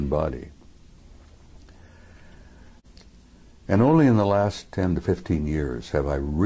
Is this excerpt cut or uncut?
cut